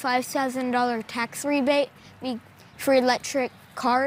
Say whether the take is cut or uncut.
uncut